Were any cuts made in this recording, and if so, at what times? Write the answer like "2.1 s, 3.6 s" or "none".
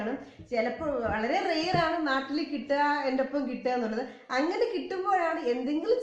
2.2 s

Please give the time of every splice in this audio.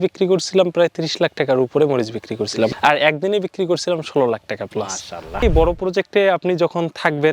5.5 s

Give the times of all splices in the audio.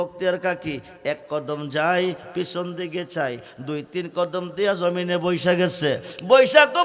none

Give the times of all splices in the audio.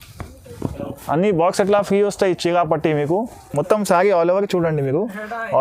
3.4 s

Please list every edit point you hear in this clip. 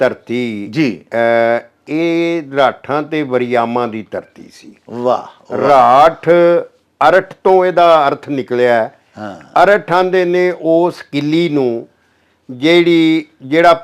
none

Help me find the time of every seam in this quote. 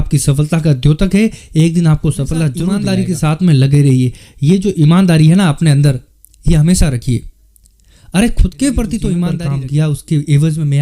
2.7 s, 9.3 s

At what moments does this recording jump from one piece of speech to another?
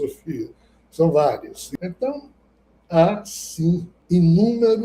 1.6 s, 3.9 s

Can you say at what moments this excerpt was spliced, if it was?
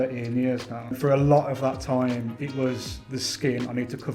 1.0 s

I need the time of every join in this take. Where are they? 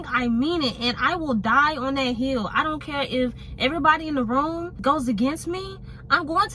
none

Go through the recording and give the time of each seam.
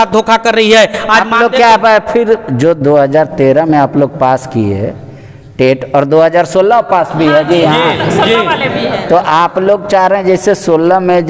none

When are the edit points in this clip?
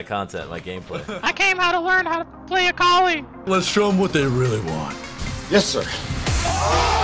1.0 s

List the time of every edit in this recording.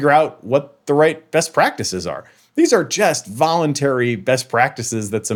none

